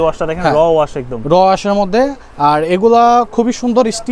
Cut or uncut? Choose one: uncut